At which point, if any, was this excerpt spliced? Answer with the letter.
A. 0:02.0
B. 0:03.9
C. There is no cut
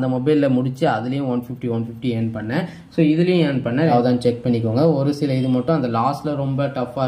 B